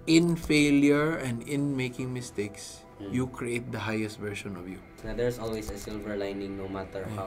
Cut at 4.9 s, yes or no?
yes